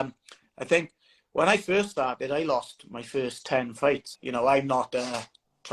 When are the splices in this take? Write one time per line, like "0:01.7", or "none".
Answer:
0:04.1